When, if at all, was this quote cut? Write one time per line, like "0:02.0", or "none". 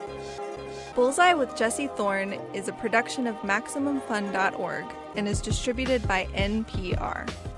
none